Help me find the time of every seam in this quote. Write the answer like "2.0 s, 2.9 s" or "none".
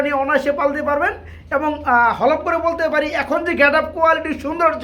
none